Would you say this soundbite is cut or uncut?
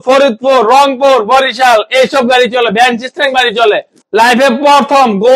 cut